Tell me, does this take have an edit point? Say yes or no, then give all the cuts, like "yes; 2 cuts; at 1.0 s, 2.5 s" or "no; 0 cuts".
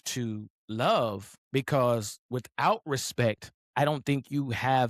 yes; 2 cuts; at 1.3 s, 3.5 s